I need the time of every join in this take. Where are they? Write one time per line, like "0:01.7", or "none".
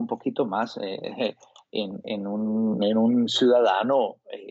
none